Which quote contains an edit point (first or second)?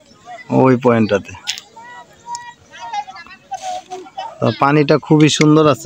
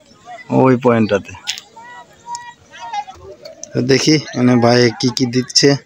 second